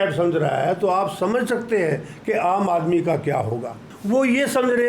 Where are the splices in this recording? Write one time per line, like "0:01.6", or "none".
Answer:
0:03.9